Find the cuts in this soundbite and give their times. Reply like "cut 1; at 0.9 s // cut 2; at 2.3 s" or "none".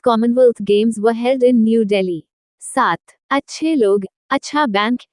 cut 1; at 2.8 s